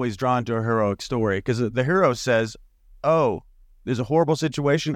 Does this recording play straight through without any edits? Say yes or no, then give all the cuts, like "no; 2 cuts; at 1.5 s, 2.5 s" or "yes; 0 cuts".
yes; 0 cuts